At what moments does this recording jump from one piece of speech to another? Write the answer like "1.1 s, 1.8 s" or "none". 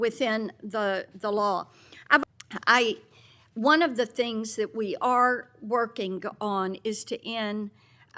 2.2 s